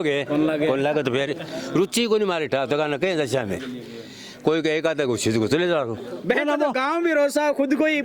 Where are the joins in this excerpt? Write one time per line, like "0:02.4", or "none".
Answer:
0:06.1